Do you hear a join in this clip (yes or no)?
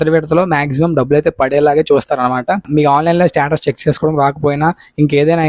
yes